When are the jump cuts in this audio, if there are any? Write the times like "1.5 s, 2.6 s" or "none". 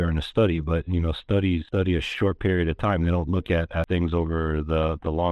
1.6 s, 3.9 s